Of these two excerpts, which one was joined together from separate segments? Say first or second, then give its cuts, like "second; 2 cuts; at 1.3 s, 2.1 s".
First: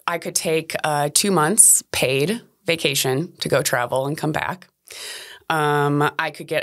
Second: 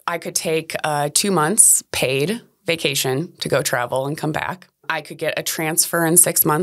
second; 1 cut; at 5.0 s